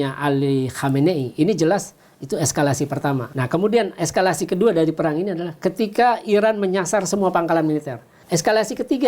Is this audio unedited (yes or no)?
no